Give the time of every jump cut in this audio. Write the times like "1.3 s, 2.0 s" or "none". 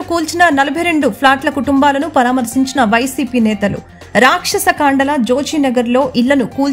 none